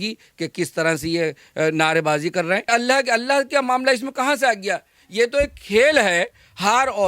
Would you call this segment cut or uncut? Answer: cut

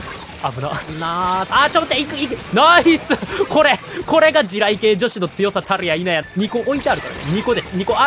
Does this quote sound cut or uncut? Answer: cut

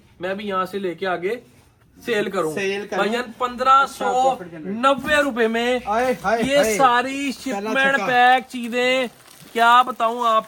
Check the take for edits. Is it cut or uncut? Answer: uncut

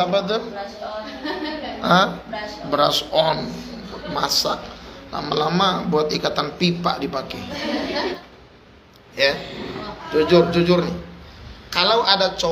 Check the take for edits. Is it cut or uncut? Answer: cut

